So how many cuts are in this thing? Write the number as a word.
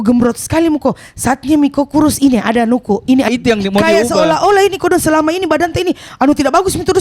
one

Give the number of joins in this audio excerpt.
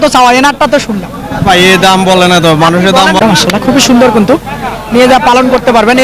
one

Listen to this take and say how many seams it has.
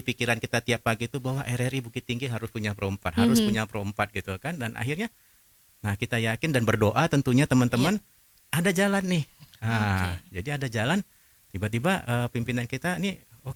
zero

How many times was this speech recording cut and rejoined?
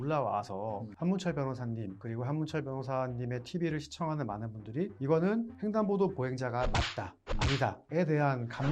four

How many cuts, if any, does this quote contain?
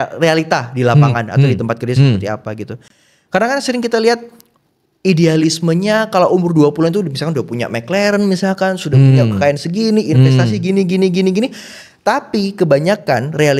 zero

